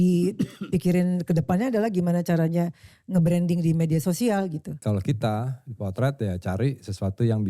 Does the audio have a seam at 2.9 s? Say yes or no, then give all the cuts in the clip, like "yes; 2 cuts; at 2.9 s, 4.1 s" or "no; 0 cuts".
no; 1 cut; at 4.8 s